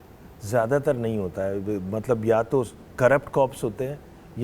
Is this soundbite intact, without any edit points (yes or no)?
yes